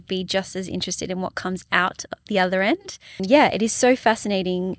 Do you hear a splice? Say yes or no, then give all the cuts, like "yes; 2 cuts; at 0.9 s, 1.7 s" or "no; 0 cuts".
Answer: yes; 1 cut; at 3.2 s